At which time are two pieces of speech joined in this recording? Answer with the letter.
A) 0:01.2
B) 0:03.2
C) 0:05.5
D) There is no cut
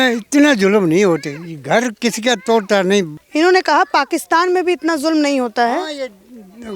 B